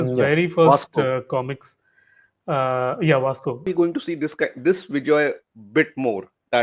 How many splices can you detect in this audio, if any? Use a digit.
1